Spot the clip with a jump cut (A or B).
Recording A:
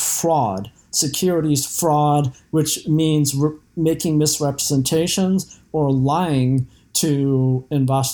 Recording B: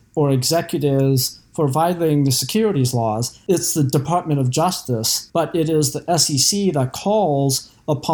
B